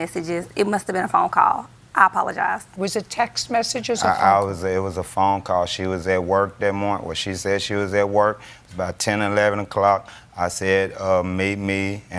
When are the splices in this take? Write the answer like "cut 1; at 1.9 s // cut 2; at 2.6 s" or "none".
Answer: cut 1; at 4.3 s